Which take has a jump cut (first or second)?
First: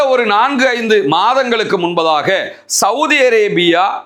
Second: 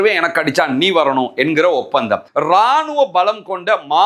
second